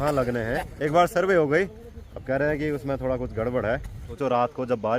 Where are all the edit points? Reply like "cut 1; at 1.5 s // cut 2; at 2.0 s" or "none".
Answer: cut 1; at 4.0 s

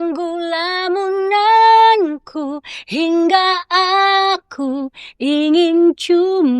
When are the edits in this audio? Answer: none

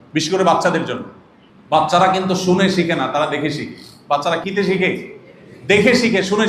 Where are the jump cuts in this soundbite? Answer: cut 1; at 4.4 s

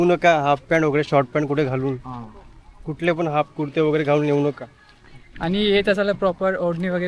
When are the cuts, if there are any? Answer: none

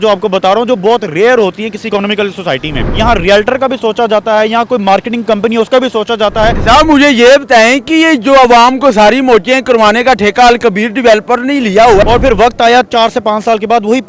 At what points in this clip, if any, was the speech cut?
cut 1; at 2.9 s // cut 2; at 6.6 s // cut 3; at 12.0 s

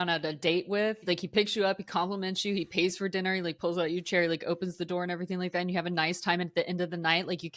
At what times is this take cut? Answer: cut 1; at 1.1 s

